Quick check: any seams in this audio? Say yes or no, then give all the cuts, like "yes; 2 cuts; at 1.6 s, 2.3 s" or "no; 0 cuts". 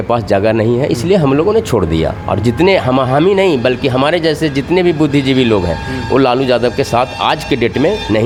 no; 0 cuts